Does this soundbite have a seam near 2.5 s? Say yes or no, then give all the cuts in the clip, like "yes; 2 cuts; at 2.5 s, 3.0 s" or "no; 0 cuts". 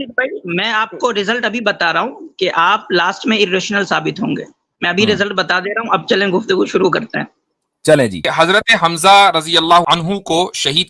no; 2 cuts; at 8.3 s, 9.8 s